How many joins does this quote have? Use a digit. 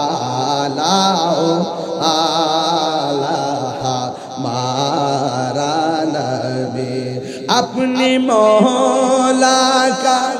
0